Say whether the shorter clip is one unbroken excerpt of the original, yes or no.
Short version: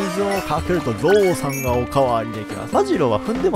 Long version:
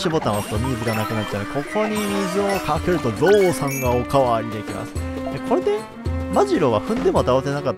no